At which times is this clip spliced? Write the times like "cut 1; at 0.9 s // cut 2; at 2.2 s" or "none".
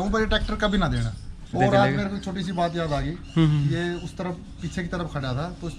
cut 1; at 1.5 s